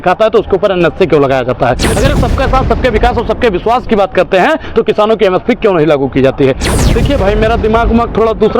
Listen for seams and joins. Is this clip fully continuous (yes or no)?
no